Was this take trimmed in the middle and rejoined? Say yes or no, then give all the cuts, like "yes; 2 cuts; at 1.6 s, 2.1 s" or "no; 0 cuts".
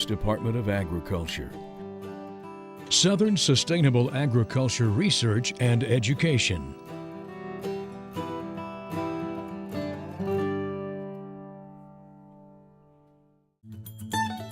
yes; 2 cuts; at 6.7 s, 13.6 s